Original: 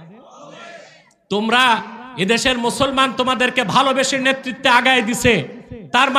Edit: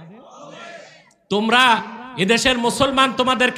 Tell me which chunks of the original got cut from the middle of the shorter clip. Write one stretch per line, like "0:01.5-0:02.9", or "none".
none